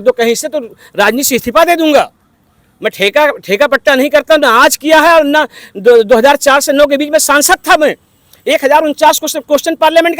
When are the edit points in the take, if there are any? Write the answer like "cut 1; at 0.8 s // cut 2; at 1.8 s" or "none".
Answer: none